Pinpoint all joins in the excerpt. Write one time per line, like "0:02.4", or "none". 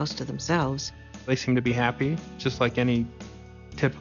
0:01.3